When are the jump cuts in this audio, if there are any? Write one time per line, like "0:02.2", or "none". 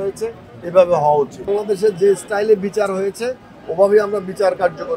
0:01.5